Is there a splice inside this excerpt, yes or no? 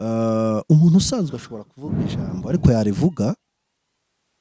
no